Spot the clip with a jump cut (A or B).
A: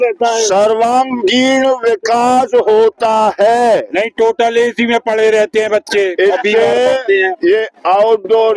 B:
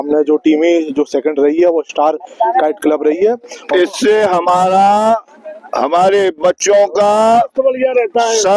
B